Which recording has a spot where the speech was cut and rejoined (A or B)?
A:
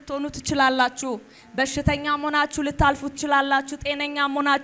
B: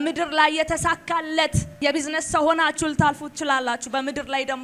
B